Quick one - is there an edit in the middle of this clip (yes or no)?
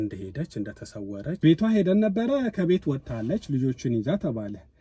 yes